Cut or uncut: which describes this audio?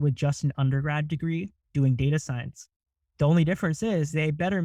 uncut